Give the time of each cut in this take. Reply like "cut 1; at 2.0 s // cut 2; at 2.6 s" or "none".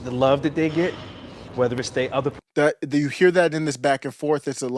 none